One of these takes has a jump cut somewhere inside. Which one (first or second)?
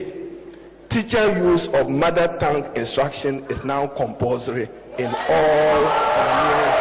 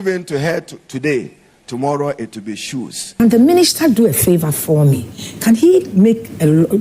second